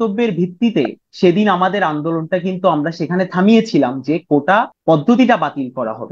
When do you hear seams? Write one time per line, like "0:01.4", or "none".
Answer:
0:01.0
0:04.7